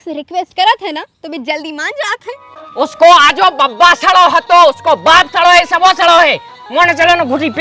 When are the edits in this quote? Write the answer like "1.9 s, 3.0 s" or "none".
2.6 s